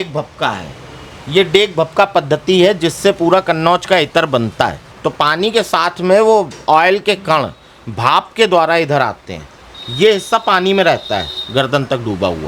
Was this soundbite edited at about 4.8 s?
yes; 1 cut; at 4.8 s

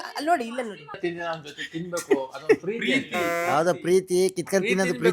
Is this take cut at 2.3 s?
no; 1 cut; at 1.0 s

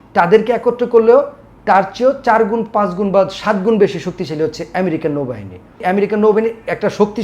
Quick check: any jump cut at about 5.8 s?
yes; 1 cut; at 5.8 s

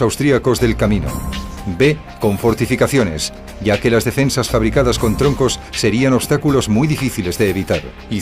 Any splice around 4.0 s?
no; 1 cut; at 2.5 s

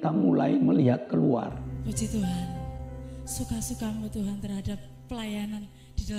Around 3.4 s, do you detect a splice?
no; 1 cut; at 1.7 s

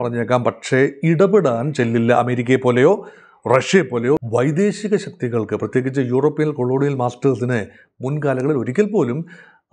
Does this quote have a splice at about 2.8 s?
no; 1 cut; at 4.2 s

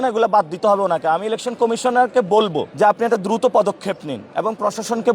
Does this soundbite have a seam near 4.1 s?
no; 1 cut; at 2.6 s

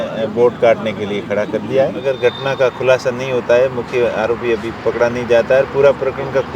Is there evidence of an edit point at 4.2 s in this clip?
no; 1 cut; at 2.1 s

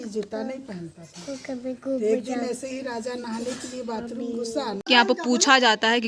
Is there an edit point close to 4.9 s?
yes; 1 cut; at 4.9 s

